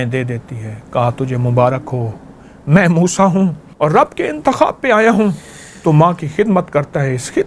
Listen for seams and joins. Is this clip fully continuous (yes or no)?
no